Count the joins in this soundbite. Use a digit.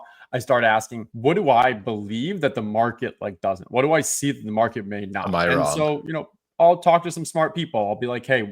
1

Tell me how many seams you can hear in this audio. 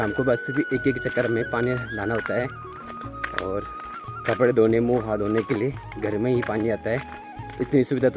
0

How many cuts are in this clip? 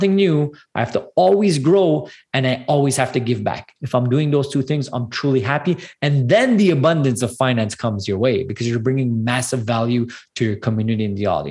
0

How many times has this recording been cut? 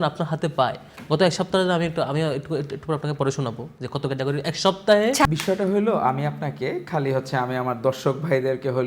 1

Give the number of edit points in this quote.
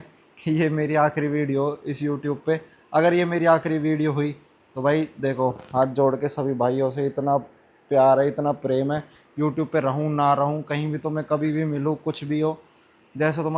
0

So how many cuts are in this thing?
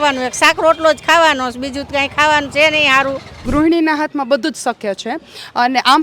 1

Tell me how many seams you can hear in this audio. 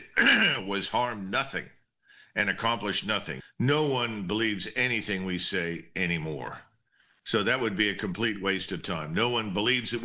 1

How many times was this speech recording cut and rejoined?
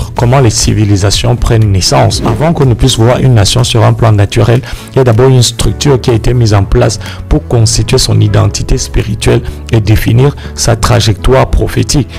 1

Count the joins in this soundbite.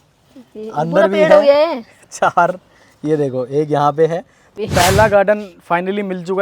1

